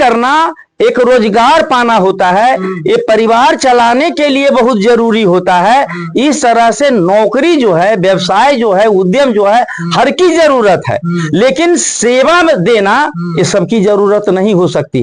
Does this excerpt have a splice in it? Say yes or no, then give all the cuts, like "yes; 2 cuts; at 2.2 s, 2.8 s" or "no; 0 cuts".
no; 0 cuts